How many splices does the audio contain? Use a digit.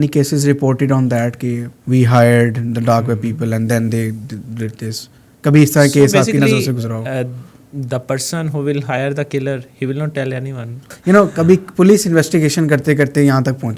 2